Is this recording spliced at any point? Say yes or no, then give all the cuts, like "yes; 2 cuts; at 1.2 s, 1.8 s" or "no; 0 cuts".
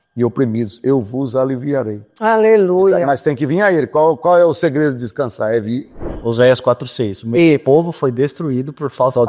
yes; 1 cut; at 6.0 s